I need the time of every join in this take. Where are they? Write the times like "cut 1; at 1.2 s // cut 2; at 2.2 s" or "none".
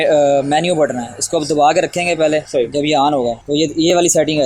cut 1; at 2.5 s // cut 2; at 3.4 s